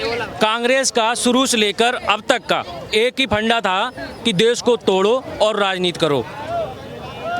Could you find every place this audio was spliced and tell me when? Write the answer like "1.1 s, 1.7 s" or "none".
none

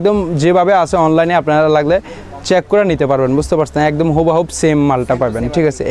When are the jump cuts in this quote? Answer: none

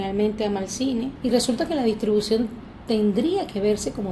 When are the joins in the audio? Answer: 1.1 s

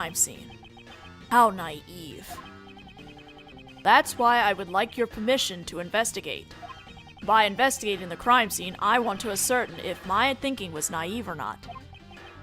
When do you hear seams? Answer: 7.7 s

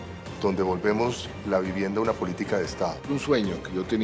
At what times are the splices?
3.0 s

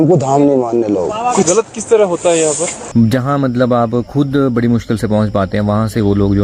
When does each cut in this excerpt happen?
2.7 s

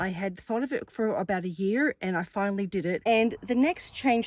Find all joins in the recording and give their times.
3.0 s

